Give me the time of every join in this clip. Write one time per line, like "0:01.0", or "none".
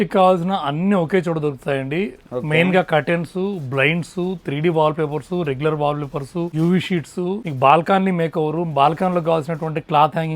0:06.5
0:07.5